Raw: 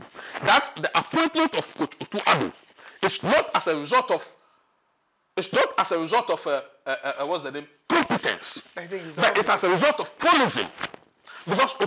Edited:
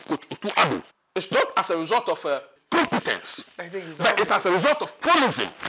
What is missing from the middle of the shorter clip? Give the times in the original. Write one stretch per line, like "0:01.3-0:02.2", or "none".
0:02.7-0:05.2
0:06.7-0:07.7